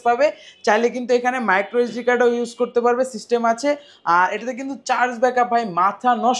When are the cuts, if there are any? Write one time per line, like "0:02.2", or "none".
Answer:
none